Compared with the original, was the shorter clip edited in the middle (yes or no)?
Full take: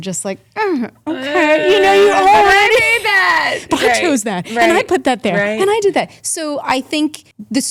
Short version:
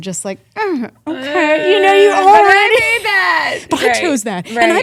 no